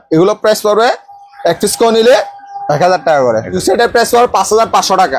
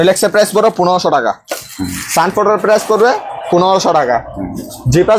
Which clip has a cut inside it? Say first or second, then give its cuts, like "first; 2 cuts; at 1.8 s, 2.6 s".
first; 1 cut; at 3.6 s